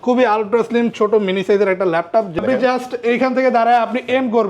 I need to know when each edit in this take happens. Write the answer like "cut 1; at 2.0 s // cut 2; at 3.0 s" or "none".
cut 1; at 2.4 s